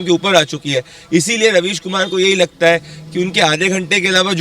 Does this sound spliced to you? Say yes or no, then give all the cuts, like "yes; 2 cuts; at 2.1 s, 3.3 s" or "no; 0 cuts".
no; 0 cuts